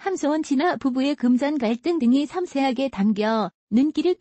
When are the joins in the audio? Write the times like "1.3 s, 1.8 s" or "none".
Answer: none